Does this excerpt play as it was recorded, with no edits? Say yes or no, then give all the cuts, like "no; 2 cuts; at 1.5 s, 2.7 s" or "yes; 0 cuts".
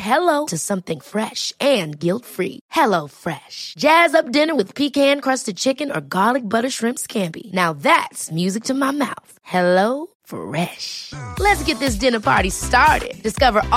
yes; 0 cuts